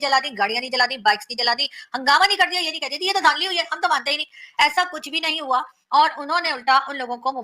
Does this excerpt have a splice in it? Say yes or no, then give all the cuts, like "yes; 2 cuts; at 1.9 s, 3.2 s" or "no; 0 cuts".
no; 0 cuts